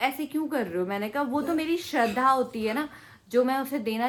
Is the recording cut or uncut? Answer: uncut